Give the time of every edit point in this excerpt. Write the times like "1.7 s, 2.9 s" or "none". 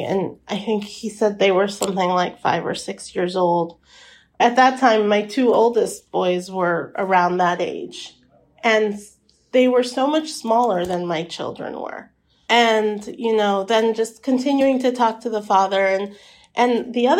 4.4 s